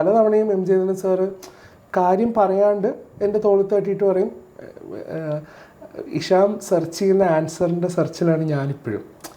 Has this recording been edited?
no; 0 cuts

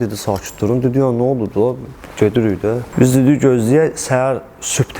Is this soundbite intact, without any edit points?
no; 1 cut; at 2.9 s

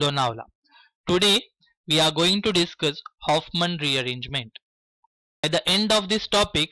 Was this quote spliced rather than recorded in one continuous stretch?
yes; 1 cut; at 5.4 s

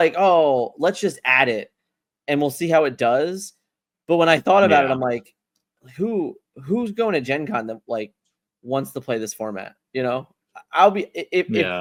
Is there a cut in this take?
no; 0 cuts

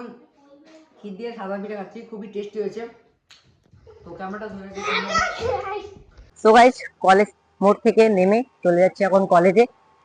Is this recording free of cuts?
no; 1 cut; at 6.4 s

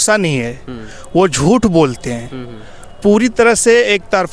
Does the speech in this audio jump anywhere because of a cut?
no; 0 cuts

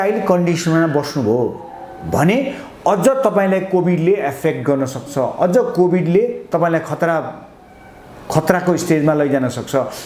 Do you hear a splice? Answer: no; 0 cuts

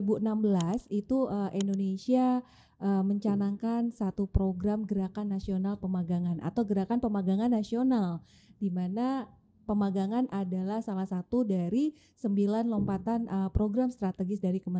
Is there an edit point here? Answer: no; 0 cuts

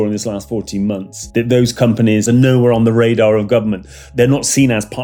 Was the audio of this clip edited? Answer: yes; 3 cuts; at 1.1 s, 2.2 s, 4.1 s

